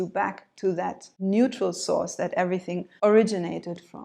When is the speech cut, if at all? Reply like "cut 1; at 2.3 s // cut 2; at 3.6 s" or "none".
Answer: cut 1; at 1.1 s // cut 2; at 2.8 s